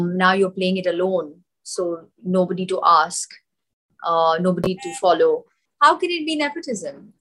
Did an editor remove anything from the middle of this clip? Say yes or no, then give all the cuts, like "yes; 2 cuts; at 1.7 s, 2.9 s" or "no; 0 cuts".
yes; 1 cut; at 5.6 s